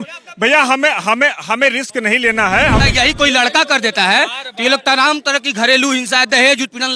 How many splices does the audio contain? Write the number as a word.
one